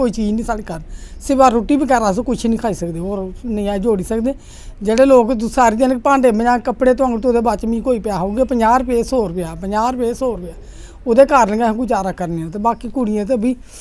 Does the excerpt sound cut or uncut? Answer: uncut